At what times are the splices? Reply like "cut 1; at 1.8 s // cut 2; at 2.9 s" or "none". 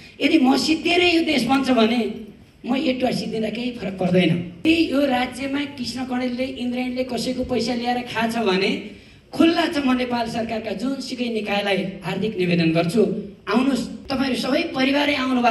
cut 1; at 4.6 s // cut 2; at 14.0 s